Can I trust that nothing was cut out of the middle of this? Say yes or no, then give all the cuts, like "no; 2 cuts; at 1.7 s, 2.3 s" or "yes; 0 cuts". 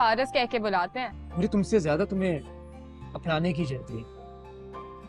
no; 1 cut; at 1.2 s